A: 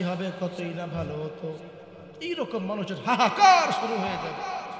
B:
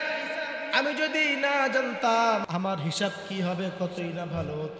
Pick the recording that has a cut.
B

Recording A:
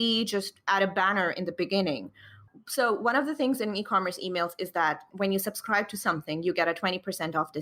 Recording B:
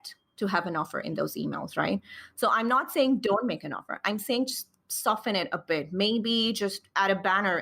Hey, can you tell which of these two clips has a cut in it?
A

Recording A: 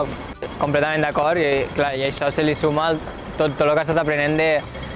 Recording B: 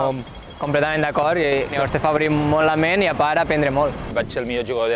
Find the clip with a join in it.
B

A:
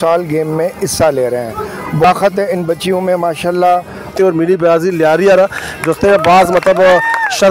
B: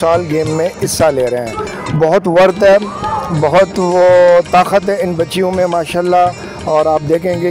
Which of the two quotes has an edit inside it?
A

